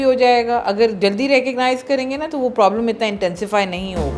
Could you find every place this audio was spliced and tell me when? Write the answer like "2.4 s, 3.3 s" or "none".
none